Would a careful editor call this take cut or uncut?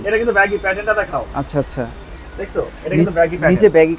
uncut